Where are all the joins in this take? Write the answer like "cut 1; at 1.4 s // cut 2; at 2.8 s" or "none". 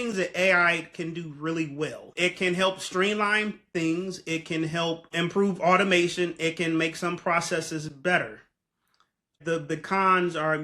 cut 1; at 2.1 s // cut 2; at 5.1 s // cut 3; at 9.4 s